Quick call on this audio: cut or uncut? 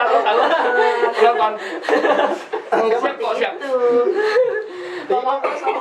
uncut